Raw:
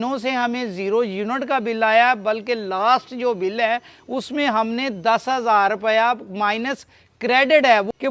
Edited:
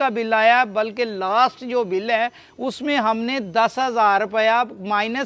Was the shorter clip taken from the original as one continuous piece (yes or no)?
yes